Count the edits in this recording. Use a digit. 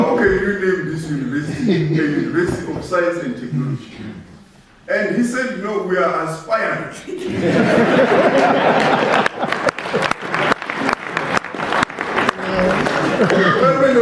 0